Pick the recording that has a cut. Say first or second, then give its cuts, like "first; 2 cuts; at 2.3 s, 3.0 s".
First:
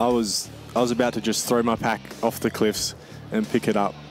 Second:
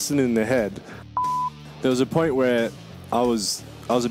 second; 1 cut; at 1.2 s